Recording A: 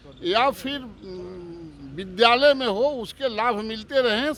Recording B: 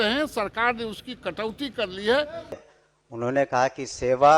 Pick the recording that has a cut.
B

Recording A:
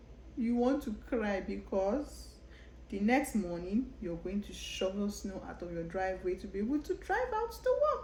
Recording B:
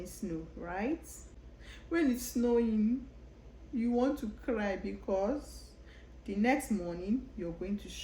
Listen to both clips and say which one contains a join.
B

